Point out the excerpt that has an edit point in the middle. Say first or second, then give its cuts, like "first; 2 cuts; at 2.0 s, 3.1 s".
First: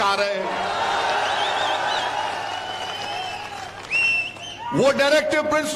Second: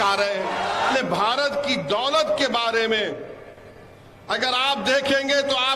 second; 1 cut; at 0.9 s